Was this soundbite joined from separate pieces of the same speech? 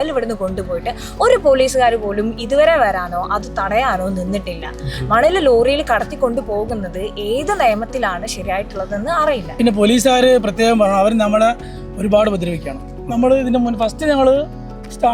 yes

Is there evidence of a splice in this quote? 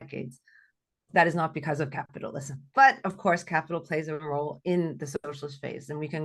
no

